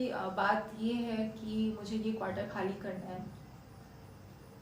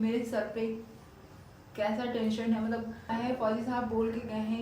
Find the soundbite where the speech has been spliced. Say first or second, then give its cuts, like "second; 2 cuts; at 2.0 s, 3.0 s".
second; 1 cut; at 3.1 s